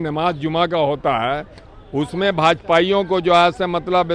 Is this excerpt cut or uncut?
uncut